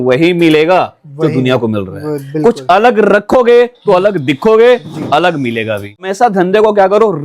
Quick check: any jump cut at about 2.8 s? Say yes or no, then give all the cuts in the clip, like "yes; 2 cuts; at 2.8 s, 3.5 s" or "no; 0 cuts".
no; 1 cut; at 6.0 s